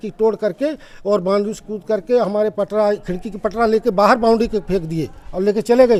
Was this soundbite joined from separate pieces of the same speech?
no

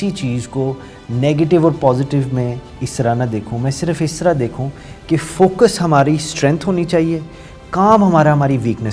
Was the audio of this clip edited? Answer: no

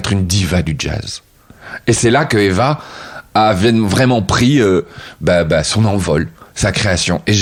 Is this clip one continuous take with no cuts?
yes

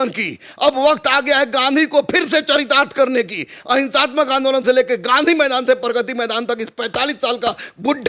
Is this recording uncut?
yes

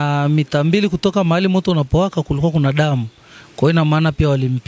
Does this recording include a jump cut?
no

